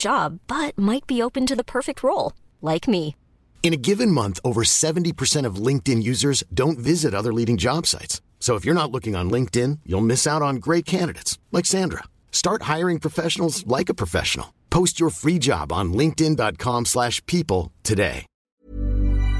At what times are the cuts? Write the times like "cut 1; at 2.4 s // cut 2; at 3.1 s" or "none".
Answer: cut 1; at 18.5 s